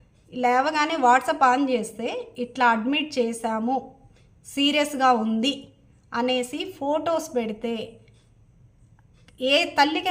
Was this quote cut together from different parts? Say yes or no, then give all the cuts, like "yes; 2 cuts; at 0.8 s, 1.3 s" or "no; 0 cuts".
no; 0 cuts